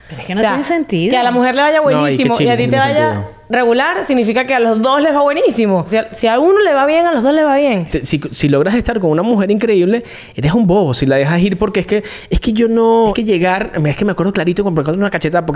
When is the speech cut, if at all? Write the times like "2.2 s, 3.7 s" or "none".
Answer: 5.9 s, 7.9 s, 13.2 s

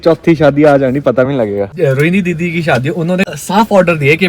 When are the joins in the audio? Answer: 1.7 s, 3.4 s

